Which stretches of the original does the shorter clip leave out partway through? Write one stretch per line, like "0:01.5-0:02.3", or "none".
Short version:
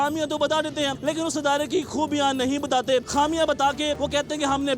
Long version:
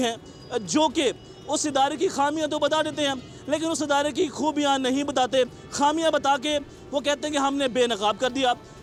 0:03.2-0:03.4
0:05.5-0:05.7
0:06.6-0:06.9